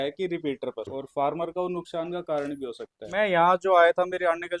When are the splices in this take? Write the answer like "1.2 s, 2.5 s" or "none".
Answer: 1.0 s, 3.1 s

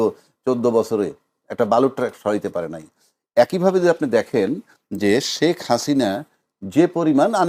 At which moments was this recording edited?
none

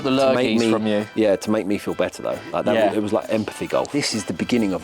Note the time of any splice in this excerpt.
3.9 s

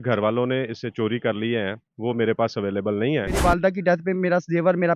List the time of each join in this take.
3.4 s

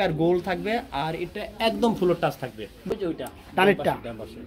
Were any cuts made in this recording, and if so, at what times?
2.9 s

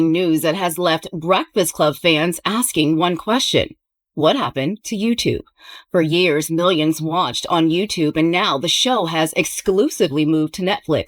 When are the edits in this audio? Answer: none

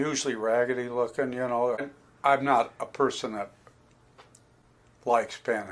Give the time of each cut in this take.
1.8 s

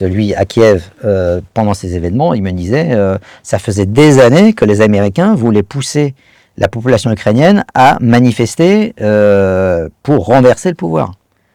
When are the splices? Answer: none

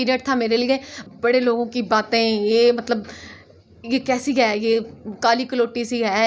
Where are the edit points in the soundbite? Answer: 0.9 s

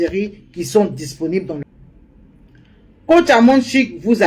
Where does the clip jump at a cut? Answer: 1.7 s

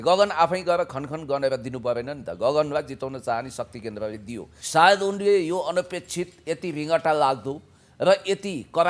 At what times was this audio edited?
4.5 s

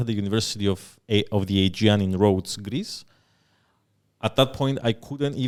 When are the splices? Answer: none

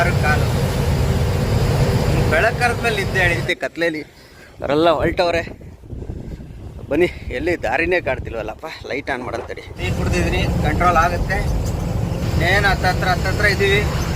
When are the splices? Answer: 3.4 s, 9.8 s

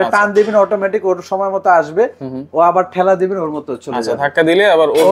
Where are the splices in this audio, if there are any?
none

